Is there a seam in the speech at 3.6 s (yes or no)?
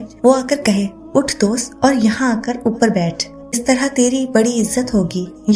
yes